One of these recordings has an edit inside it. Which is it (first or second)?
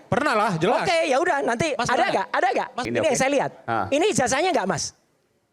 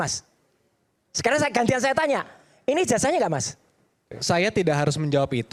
first